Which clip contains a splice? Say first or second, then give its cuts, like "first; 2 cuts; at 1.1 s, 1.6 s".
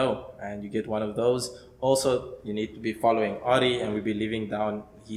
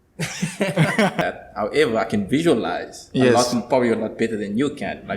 second; 1 cut; at 1.2 s